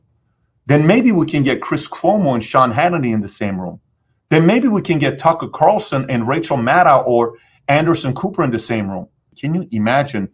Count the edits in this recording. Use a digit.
1